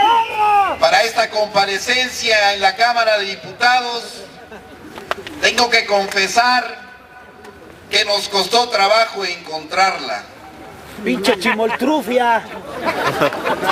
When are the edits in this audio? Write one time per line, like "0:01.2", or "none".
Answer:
none